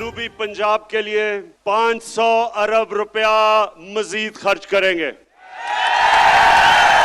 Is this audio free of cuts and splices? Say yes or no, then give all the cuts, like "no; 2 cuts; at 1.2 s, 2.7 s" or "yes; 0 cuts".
no; 1 cut; at 1.5 s